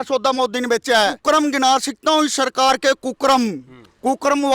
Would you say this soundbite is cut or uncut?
cut